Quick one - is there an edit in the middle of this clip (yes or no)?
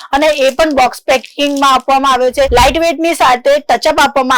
yes